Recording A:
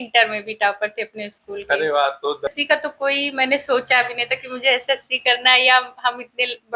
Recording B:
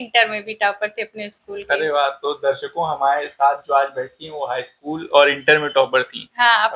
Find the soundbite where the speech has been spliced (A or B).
A